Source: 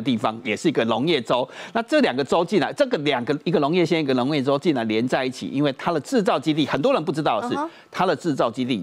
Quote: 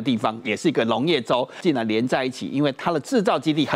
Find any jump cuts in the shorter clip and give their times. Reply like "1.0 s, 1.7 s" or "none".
1.6 s